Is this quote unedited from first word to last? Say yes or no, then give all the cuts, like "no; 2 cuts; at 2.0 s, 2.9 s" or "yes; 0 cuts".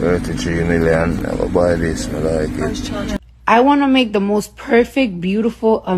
no; 1 cut; at 3.2 s